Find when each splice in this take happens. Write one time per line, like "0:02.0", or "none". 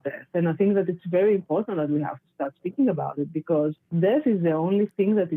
none